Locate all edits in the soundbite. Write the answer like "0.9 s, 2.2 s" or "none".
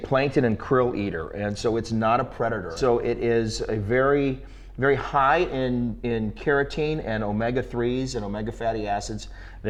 none